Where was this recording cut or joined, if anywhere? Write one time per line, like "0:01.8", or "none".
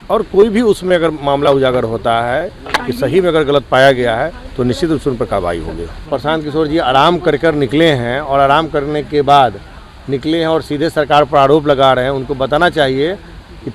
0:06.0